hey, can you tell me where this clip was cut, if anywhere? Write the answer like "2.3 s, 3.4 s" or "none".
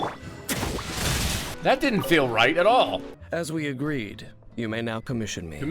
1.5 s, 3.1 s

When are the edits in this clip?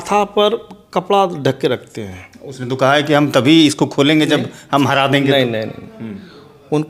none

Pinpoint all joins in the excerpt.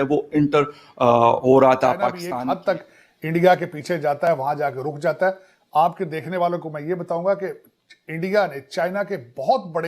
2.2 s

